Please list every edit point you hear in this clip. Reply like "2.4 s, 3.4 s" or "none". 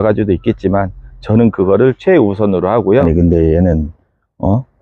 3.0 s